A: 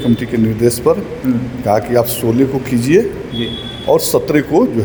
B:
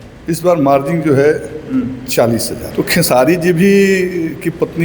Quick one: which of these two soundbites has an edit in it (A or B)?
B